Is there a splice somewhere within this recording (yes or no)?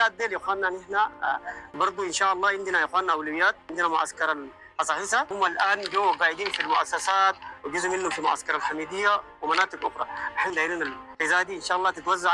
yes